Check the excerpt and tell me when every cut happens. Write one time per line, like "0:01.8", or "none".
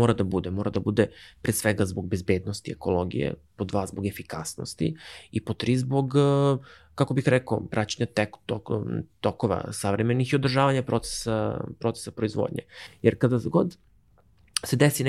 none

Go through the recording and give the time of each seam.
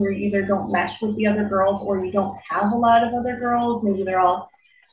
none

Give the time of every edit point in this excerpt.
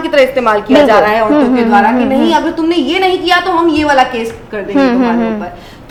none

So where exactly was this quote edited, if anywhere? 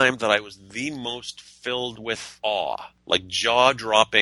0:02.3

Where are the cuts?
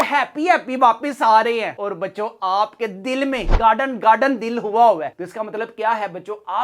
none

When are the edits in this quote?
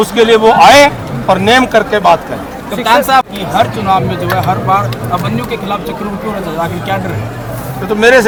none

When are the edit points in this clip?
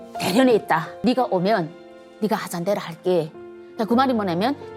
0:00.9

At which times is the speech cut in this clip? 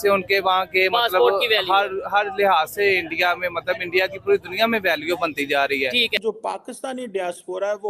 0:06.1

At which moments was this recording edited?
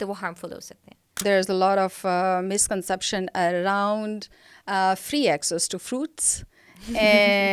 0:01.2

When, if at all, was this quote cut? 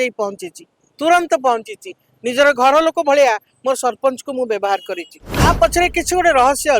0:05.1

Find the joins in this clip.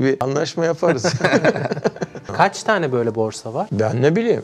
0:02.3

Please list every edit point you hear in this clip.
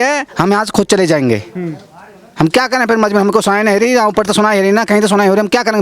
none

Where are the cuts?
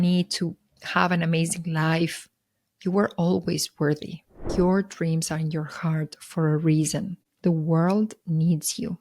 0:04.4

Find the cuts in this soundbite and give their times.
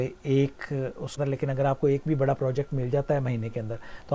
0:01.2

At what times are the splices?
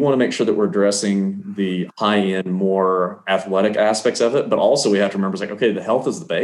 none

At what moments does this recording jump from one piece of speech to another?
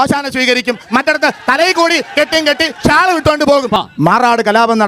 0:03.7

